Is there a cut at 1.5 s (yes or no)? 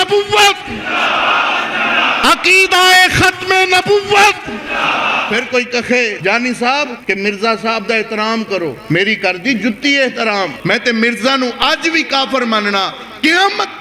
no